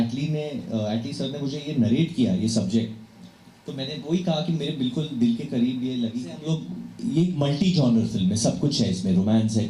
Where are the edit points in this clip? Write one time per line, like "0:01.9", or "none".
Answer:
0:06.3